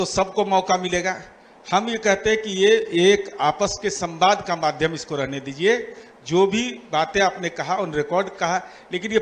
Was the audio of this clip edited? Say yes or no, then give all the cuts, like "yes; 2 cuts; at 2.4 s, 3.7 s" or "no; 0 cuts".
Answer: no; 0 cuts